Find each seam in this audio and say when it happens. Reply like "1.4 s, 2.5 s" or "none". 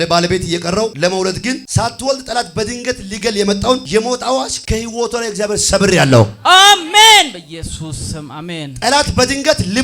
0.9 s, 1.7 s, 3.8 s, 4.6 s